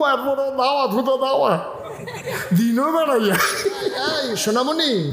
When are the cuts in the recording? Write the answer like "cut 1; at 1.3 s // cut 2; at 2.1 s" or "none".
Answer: cut 1; at 4.0 s